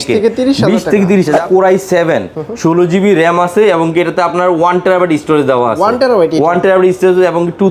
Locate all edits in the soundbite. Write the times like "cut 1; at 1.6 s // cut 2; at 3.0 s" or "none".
cut 1; at 1.4 s